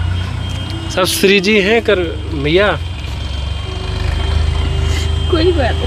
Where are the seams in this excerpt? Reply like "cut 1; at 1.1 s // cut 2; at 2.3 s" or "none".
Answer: none